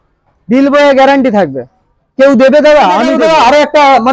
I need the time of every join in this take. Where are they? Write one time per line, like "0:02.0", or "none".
0:03.1